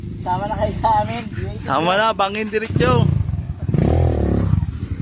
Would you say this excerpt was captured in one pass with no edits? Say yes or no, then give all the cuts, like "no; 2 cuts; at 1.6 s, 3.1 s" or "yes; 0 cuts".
yes; 0 cuts